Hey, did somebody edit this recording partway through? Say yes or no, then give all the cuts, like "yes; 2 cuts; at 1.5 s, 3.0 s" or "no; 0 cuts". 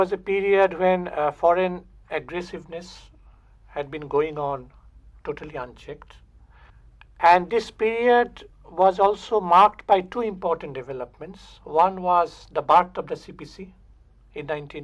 no; 0 cuts